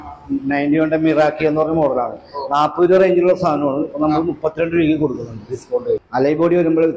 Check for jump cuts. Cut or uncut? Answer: cut